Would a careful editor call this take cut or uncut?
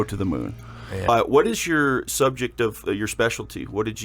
cut